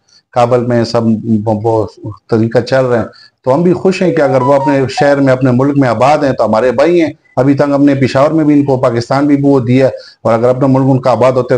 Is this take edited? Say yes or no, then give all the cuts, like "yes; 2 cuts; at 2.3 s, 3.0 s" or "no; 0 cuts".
no; 0 cuts